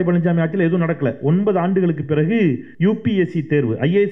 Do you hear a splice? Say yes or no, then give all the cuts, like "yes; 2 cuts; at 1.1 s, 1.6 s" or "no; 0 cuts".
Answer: yes; 1 cut; at 2.7 s